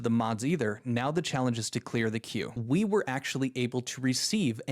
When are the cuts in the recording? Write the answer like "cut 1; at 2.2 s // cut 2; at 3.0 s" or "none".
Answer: cut 1; at 2.5 s